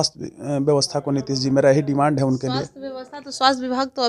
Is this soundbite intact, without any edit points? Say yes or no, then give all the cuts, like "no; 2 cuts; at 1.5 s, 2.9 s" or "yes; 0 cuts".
yes; 0 cuts